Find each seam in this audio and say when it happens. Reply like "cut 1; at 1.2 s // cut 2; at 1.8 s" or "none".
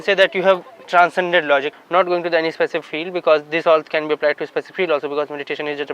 cut 1; at 1.7 s